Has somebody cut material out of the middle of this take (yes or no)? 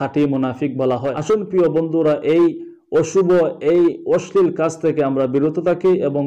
yes